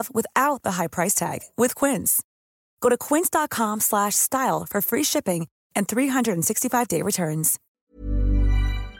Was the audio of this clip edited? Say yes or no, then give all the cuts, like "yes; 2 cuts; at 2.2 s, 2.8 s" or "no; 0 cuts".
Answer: yes; 1 cut; at 7.6 s